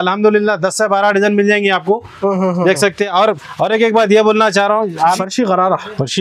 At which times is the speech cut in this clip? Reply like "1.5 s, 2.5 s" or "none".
5.2 s